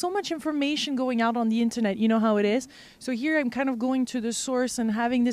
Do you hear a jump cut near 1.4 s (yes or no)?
yes